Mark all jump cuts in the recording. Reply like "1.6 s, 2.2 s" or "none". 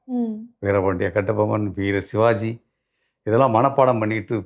none